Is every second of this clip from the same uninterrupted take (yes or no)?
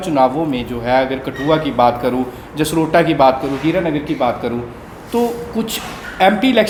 yes